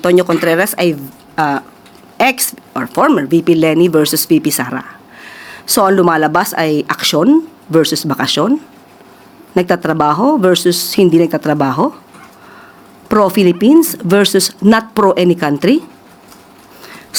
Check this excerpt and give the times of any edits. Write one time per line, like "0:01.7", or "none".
none